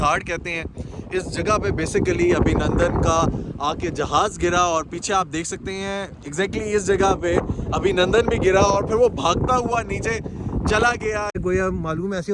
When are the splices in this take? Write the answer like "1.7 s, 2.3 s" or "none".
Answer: 11.4 s

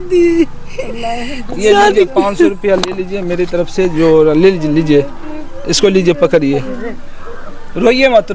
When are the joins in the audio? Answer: none

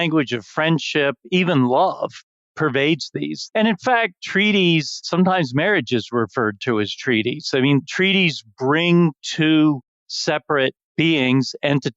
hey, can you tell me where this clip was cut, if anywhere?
none

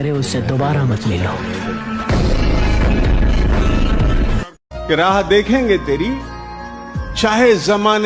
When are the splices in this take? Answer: none

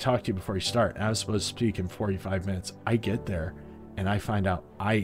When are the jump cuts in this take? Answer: none

